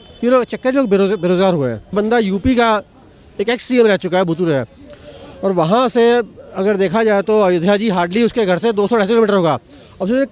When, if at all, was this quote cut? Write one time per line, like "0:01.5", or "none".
0:01.9